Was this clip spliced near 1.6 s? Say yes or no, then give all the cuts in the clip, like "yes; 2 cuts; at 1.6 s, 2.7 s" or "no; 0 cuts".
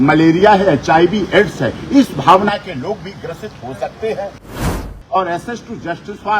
no; 1 cut; at 4.6 s